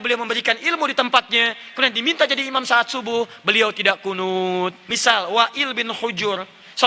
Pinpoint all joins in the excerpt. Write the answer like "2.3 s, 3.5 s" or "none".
4.9 s